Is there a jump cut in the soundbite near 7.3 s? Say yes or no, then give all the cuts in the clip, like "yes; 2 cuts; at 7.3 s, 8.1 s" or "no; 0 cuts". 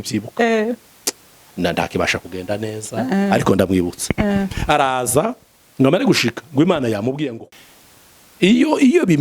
yes; 1 cut; at 7.3 s